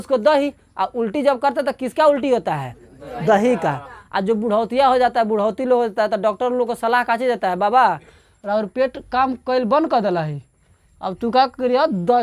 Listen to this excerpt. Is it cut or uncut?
uncut